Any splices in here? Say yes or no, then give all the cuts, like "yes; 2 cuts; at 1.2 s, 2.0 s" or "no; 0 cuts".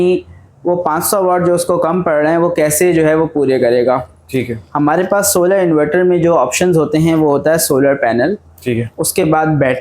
no; 0 cuts